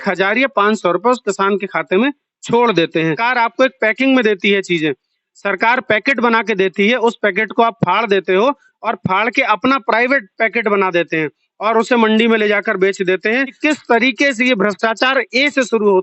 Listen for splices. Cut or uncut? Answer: cut